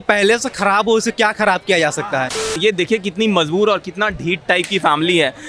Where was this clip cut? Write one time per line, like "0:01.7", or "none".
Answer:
0:02.5